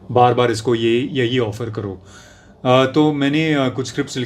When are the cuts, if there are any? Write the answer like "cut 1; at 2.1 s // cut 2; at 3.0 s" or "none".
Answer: none